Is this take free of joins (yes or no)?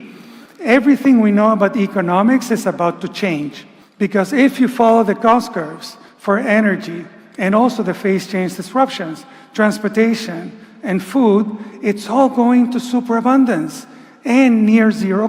yes